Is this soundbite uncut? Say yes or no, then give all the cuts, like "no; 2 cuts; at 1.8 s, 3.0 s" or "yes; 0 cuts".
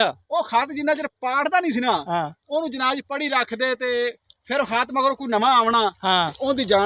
yes; 0 cuts